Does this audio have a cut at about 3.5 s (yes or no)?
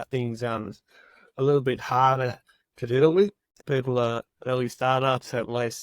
yes